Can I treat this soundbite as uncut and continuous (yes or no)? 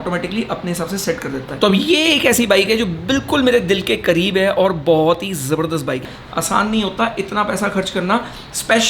no